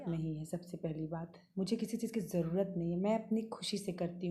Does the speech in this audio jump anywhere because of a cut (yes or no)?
no